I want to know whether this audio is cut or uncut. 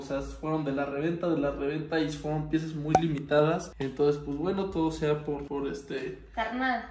uncut